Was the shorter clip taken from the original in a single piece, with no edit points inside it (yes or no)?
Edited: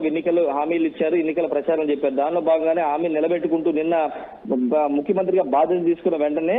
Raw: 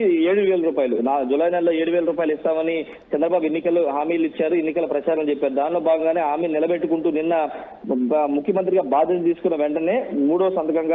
yes